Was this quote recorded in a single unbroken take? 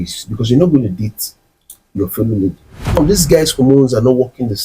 no; 1 cut; at 3.0 s

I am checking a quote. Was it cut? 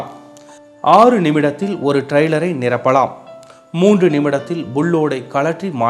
yes; 1 cut; at 2.4 s

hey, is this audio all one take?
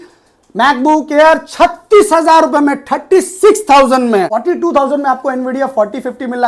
no; 1 cut; at 4.3 s

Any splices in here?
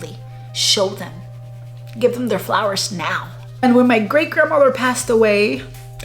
yes; 1 cut; at 3.6 s

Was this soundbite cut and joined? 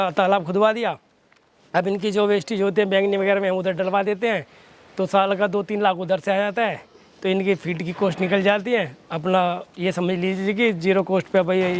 no; 0 cuts

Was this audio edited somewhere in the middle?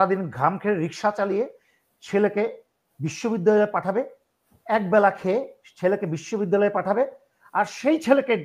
no; 0 cuts

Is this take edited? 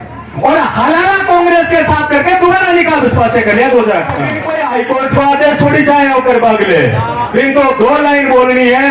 yes; 1 cut; at 4.4 s

